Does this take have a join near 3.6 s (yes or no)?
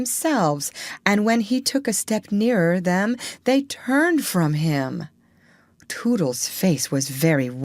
yes